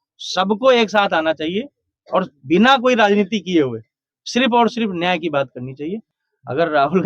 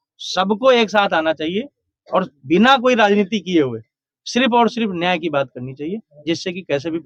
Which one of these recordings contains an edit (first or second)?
first